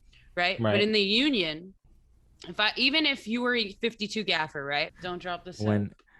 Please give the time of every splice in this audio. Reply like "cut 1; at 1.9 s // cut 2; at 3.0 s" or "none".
cut 1; at 4.9 s